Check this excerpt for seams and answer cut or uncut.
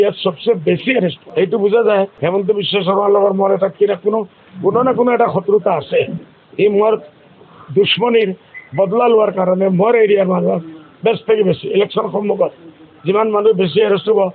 cut